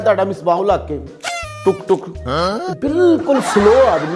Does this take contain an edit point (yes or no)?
no